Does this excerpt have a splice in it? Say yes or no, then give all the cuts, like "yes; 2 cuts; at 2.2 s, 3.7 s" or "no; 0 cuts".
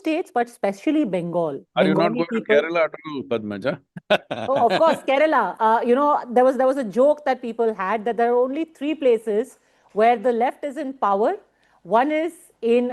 yes; 1 cut; at 1.6 s